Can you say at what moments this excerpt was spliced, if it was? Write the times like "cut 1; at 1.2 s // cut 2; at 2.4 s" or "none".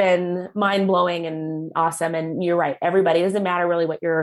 none